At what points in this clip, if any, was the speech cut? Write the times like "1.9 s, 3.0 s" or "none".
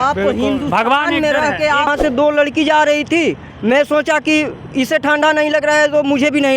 1.9 s

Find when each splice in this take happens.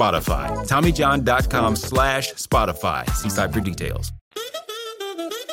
4.1 s

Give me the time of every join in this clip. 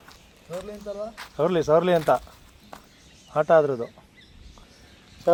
none

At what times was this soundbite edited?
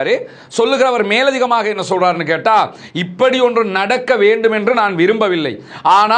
none

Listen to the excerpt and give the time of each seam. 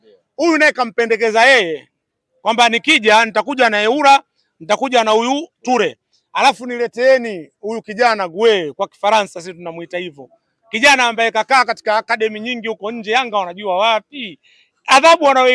none

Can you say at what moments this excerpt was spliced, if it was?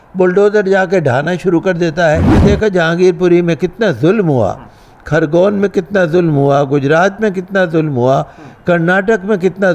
2.3 s

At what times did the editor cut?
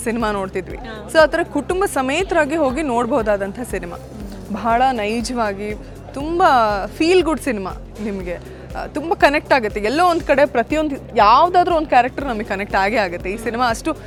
none

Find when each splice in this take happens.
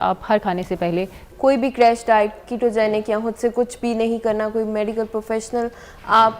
1.2 s

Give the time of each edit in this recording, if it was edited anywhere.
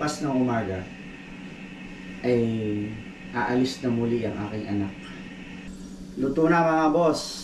5.7 s

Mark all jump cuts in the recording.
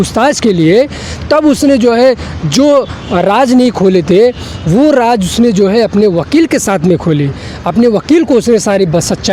none

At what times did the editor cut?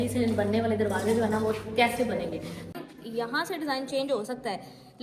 2.8 s

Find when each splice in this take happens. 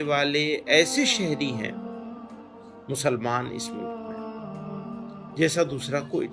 3.7 s, 5.4 s

